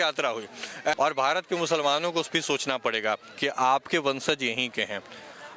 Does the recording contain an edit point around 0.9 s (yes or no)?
yes